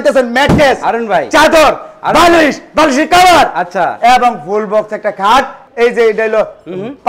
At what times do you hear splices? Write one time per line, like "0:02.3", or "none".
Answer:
0:05.6